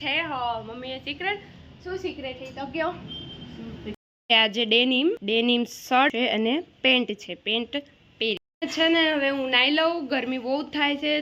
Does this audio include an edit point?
yes; 3 cuts; at 4.0 s, 5.2 s, 6.1 s

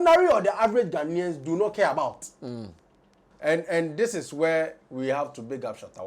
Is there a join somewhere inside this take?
yes; 1 cut; at 3.3 s

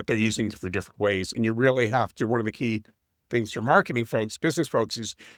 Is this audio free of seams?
yes; 0 cuts

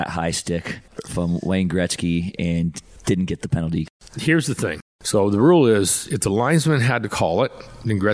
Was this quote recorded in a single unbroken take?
no; 4 cuts; at 1.0 s, 2.9 s, 3.9 s, 4.9 s

